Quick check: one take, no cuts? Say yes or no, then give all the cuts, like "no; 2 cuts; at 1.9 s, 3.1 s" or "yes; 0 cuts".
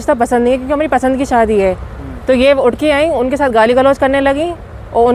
yes; 0 cuts